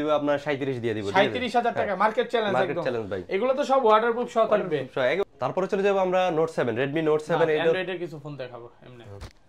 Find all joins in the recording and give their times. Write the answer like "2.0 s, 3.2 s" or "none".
none